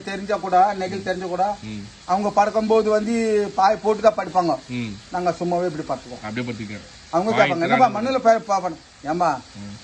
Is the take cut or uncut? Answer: uncut